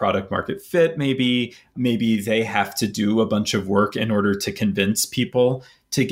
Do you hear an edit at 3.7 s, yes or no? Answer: no